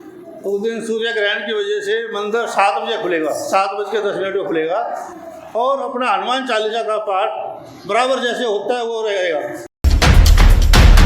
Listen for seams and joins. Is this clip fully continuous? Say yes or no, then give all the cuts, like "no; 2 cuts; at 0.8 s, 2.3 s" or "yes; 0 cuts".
no; 1 cut; at 9.6 s